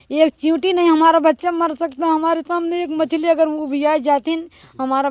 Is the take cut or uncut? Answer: uncut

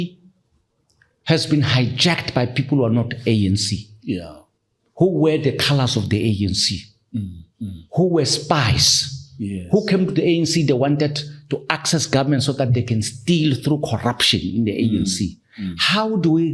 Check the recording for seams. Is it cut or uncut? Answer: uncut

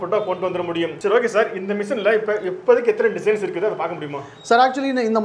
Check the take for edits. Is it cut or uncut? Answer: uncut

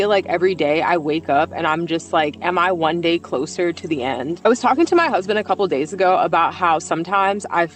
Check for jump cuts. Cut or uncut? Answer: uncut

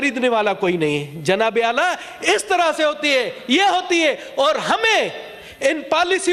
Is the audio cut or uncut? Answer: uncut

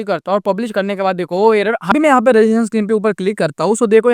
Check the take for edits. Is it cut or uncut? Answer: cut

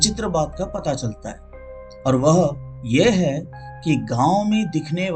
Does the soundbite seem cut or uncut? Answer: uncut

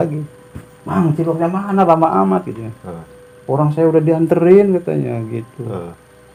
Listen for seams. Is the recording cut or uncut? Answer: uncut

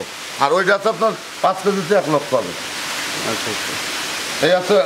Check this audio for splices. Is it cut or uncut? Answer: uncut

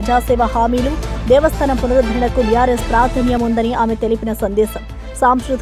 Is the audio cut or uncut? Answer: uncut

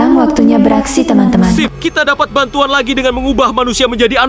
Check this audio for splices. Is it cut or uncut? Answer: cut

